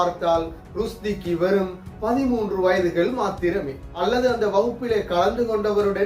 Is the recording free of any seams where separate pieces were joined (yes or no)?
no